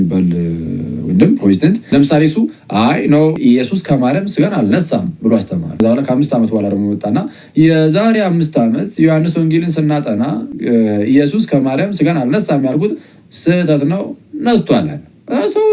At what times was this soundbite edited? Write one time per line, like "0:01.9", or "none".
0:01.8
0:03.4
0:05.8